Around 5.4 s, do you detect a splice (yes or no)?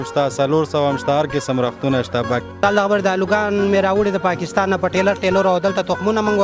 no